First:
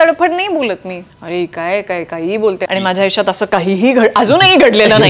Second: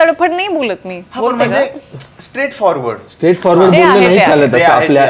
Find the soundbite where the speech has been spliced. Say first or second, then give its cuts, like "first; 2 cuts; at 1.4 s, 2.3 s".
first; 2 cuts; at 1.0 s, 2.7 s